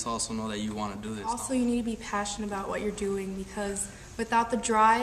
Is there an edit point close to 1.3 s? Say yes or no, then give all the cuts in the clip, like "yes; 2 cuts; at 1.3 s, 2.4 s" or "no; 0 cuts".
yes; 1 cut; at 1.3 s